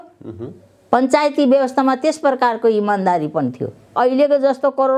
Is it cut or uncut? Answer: cut